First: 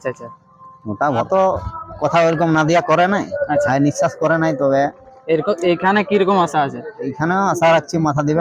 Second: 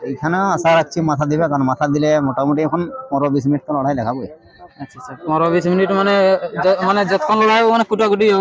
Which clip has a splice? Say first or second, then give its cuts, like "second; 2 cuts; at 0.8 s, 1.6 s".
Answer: first; 1 cut; at 1.3 s